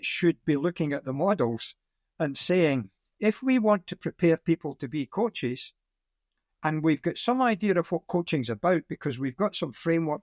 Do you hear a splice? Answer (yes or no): no